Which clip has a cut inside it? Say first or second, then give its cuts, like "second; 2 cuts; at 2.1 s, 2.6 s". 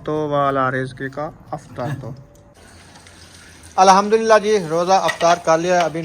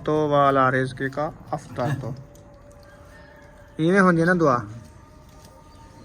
first; 1 cut; at 2.6 s